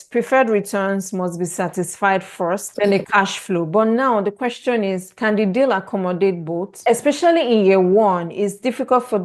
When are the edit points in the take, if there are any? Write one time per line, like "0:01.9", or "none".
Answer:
0:02.7
0:06.7